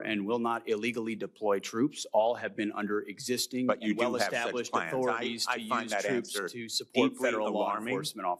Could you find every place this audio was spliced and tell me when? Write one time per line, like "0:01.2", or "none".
none